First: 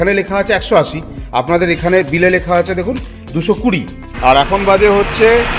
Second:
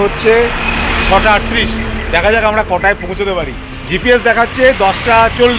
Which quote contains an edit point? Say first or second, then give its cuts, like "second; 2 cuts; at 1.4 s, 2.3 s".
first; 1 cut; at 4.0 s